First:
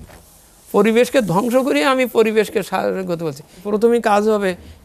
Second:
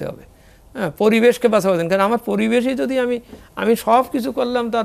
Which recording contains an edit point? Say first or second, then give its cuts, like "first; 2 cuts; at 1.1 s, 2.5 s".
first; 1 cut; at 3.6 s